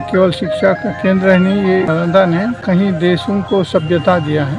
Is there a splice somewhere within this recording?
yes; 2 cuts; at 1.9 s, 2.6 s

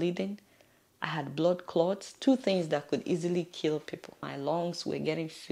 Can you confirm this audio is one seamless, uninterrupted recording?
no; 1 cut; at 4.2 s

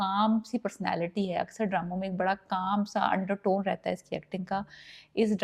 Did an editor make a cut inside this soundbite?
no; 0 cuts

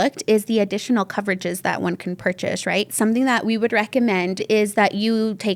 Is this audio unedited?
no; 2 cuts; at 2.9 s, 4.4 s

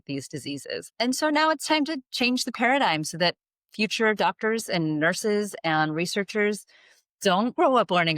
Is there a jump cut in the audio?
yes; 1 cut; at 0.9 s

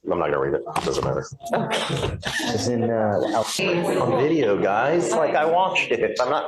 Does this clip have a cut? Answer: yes; 1 cut; at 3.6 s

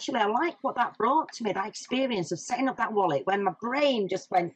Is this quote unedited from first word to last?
yes; 0 cuts

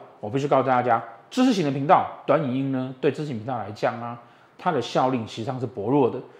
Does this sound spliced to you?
no; 0 cuts

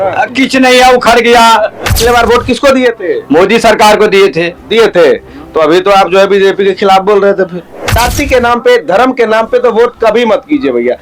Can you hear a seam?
yes; 2 cuts; at 1.8 s, 7.9 s

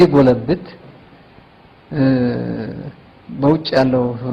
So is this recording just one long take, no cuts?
yes; 0 cuts

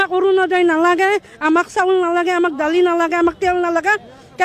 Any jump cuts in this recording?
no; 0 cuts

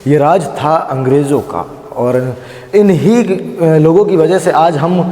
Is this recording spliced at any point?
no; 0 cuts

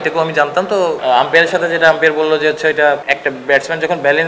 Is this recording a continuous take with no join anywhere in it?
no; 2 cuts; at 1.0 s, 3.0 s

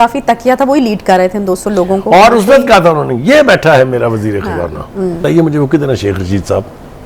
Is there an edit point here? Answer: yes; 1 cut; at 5.2 s

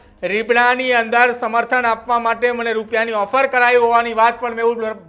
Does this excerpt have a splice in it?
no; 0 cuts

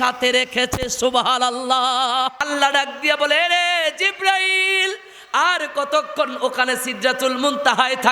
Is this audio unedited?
no; 1 cut; at 2.4 s

